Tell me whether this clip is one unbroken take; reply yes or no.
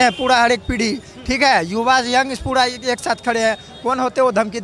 yes